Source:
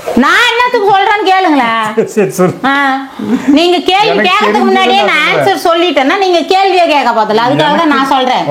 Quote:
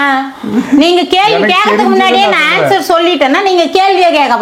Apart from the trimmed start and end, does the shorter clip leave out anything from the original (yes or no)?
no